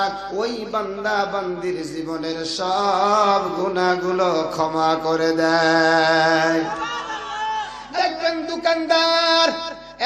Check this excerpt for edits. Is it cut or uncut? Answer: cut